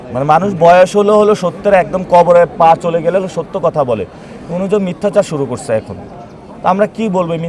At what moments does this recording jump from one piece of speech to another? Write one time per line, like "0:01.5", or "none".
none